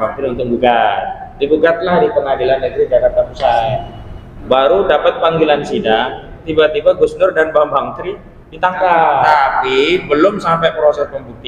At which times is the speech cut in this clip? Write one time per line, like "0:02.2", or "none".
0:09.3

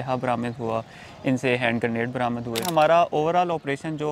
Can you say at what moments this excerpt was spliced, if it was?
0:02.6

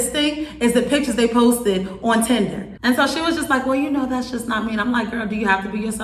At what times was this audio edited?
0:02.7

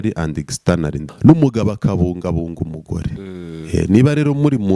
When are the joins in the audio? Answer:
0:01.0

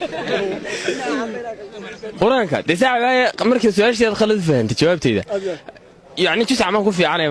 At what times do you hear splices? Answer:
none

